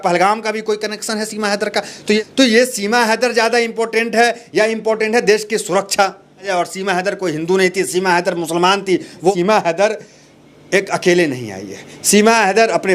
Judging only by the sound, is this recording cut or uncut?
cut